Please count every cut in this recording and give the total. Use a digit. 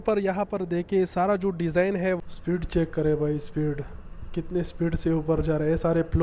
1